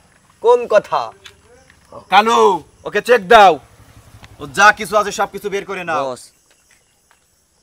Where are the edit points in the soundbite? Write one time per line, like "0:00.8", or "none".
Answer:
0:05.9